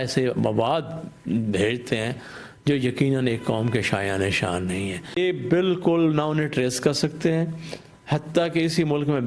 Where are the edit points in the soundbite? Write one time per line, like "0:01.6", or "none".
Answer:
0:05.1